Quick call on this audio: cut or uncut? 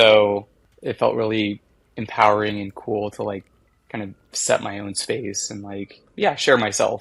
cut